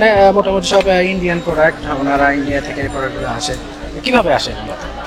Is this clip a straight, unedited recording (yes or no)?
yes